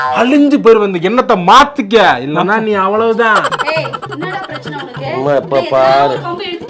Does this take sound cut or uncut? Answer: uncut